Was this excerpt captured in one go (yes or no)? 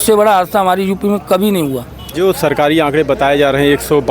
no